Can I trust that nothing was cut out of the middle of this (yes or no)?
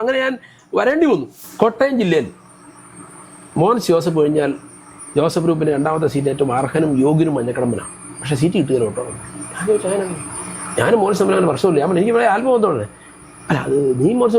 no